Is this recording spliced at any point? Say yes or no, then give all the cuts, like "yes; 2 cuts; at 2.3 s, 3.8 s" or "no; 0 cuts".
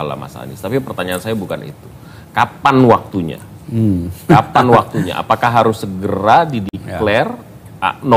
no; 0 cuts